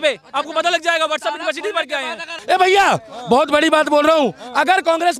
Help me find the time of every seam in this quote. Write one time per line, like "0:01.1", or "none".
0:02.4